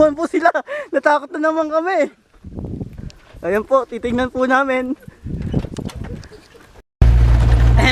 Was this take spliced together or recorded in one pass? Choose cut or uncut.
cut